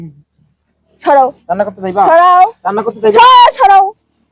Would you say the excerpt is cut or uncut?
uncut